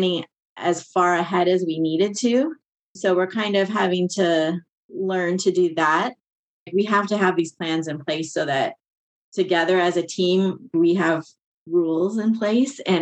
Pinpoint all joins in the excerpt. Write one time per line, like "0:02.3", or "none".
0:02.9
0:06.7
0:10.7